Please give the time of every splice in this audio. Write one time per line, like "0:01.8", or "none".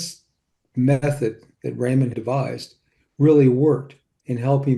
0:02.1